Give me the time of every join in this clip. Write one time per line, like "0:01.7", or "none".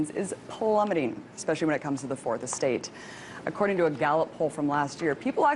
0:03.1